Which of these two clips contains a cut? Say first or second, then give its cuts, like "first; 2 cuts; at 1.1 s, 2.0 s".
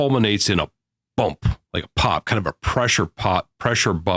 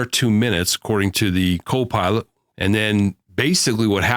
second; 1 cut; at 2.5 s